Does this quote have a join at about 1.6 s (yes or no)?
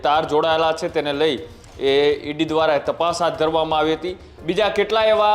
no